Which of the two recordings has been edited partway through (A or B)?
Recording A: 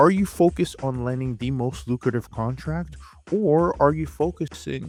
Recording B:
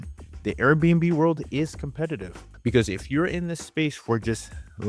B